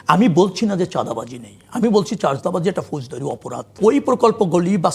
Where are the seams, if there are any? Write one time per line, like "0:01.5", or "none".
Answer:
0:03.8